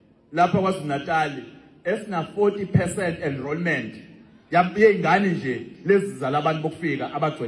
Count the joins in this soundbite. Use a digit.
0